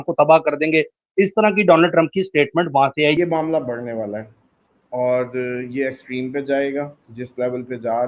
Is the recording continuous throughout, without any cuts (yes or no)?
no